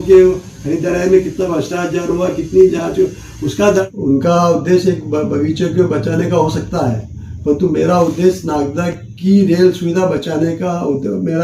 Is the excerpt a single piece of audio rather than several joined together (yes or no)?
no